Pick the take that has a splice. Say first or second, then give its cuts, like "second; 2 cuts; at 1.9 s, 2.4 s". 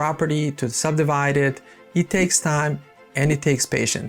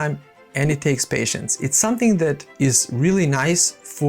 second; 1 cut; at 2.5 s